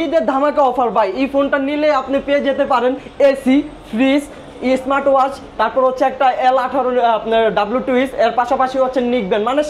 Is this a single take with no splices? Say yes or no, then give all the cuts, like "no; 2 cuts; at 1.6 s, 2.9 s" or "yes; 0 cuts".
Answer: yes; 0 cuts